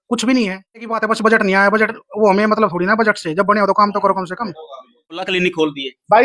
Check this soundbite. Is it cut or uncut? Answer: cut